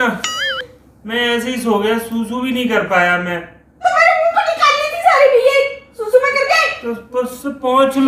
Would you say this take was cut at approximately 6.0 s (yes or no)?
no